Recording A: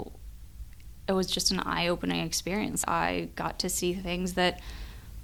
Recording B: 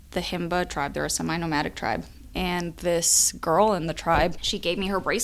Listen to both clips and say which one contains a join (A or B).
B